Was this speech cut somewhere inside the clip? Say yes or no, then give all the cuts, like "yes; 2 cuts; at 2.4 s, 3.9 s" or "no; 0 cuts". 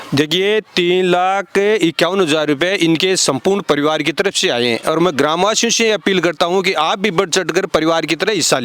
no; 0 cuts